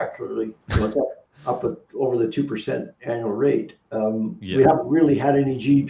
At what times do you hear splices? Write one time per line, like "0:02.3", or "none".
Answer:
0:02.9